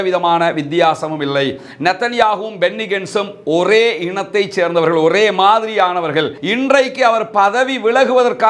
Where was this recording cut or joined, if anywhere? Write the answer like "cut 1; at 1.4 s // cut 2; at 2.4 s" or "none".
cut 1; at 6.4 s

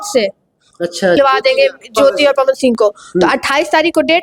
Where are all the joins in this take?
cut 1; at 1.2 s

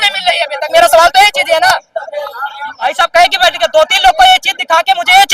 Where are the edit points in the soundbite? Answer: cut 1; at 2.9 s

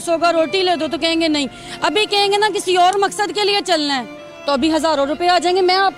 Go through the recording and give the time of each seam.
none

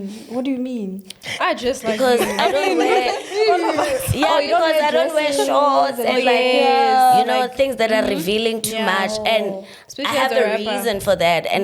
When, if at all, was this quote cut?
none

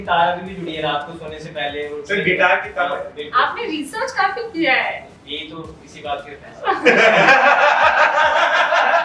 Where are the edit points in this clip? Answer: none

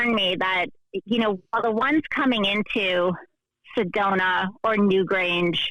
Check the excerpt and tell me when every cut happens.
none

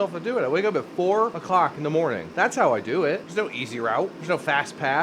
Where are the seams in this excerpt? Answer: cut 1; at 1.4 s // cut 2; at 2.3 s // cut 3; at 3.3 s // cut 4; at 4.2 s

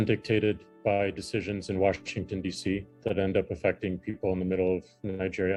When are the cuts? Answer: none

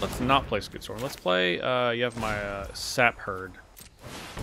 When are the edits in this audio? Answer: none

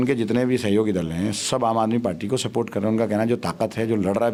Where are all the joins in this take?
none

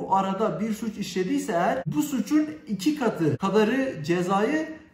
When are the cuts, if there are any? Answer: cut 1; at 1.9 s // cut 2; at 3.4 s

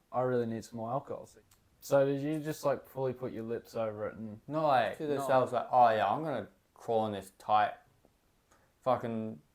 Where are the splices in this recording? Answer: cut 1; at 1.3 s // cut 2; at 5.1 s

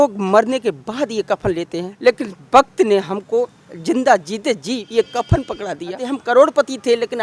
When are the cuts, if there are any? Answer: cut 1; at 1.9 s // cut 2; at 4.9 s // cut 3; at 6.0 s

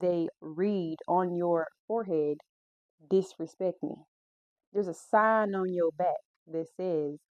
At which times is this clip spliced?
none

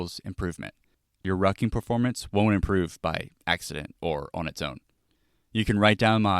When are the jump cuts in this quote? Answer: cut 1; at 1.2 s

